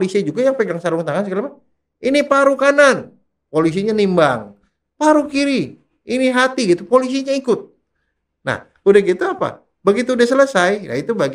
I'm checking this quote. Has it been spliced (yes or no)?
no